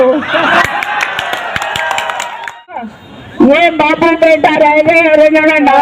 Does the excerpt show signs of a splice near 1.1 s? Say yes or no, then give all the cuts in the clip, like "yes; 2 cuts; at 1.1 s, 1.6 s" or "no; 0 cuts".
no; 1 cut; at 2.9 s